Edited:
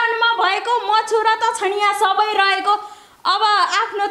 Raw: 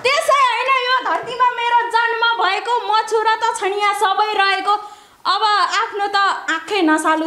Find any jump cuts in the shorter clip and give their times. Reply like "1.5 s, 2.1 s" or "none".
none